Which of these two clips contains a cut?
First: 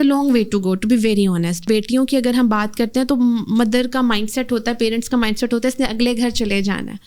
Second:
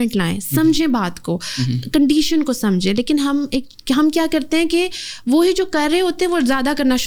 first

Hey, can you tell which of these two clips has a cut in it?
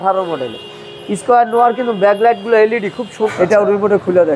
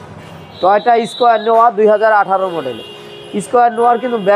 first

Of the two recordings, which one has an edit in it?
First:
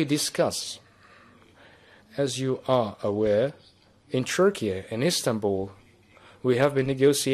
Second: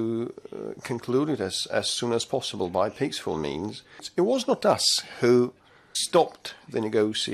second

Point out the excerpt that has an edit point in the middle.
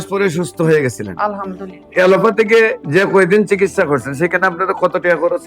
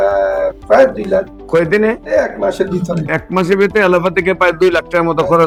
first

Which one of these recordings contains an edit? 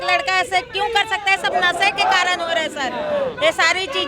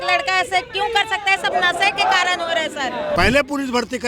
second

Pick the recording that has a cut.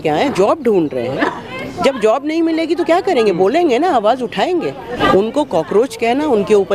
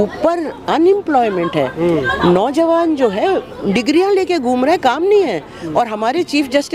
first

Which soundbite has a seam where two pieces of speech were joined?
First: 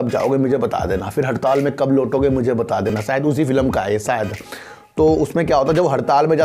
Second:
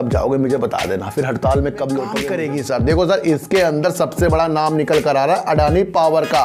second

